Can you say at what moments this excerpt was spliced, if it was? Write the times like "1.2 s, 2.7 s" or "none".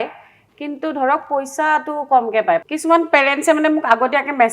2.6 s